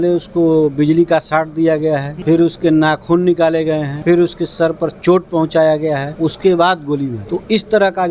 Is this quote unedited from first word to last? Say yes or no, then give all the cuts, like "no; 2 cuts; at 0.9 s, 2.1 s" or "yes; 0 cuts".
no; 4 cuts; at 2.1 s, 3.9 s, 6.1 s, 7.2 s